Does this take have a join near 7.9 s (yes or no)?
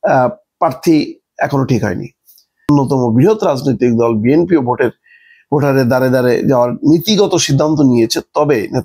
no